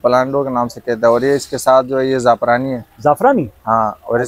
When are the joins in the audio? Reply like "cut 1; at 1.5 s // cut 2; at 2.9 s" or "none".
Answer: none